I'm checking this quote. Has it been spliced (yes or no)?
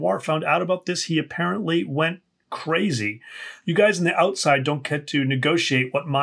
yes